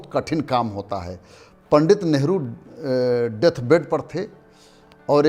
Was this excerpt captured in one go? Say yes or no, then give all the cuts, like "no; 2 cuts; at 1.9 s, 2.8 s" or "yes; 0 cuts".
yes; 0 cuts